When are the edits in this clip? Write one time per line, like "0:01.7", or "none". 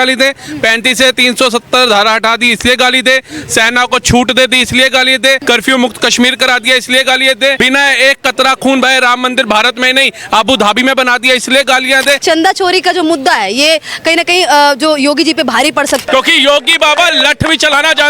0:05.4
0:07.6
0:12.2
0:16.0